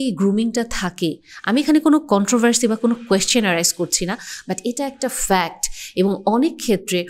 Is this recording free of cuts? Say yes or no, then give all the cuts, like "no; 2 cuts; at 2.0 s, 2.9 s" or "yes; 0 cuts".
yes; 0 cuts